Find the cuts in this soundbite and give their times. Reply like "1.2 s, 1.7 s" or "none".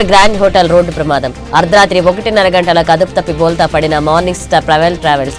none